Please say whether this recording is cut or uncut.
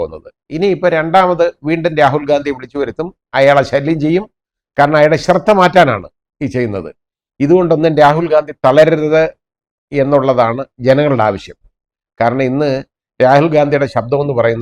uncut